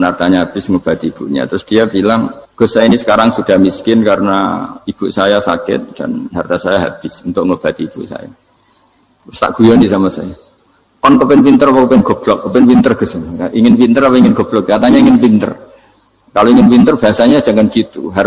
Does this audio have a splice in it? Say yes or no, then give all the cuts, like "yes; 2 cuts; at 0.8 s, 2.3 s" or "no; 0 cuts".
yes; 1 cut; at 2.4 s